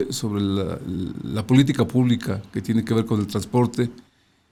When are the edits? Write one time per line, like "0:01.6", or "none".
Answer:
none